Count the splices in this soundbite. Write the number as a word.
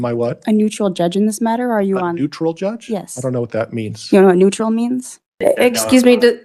one